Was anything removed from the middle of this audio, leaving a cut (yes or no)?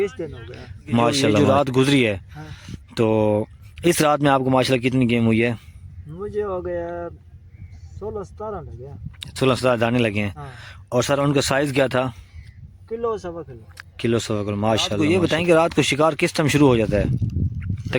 yes